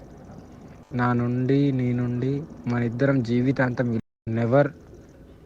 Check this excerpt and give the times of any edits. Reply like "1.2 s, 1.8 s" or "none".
4.0 s